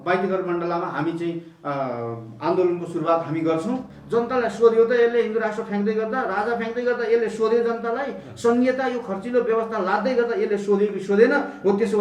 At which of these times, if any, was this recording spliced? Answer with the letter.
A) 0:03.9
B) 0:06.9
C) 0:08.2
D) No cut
A